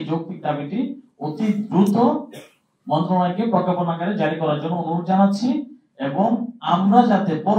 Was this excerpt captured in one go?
yes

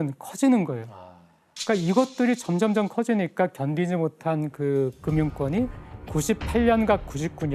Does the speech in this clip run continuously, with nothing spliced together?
yes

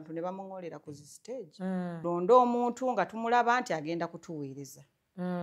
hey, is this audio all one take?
no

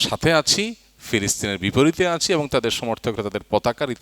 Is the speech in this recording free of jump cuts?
yes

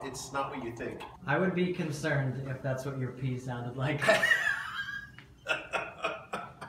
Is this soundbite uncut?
no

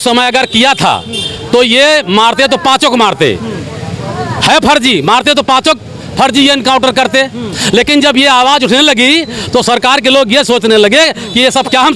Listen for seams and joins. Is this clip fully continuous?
yes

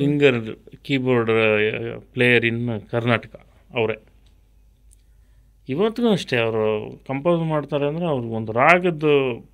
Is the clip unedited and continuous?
yes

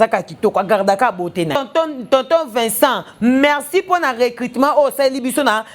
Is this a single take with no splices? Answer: no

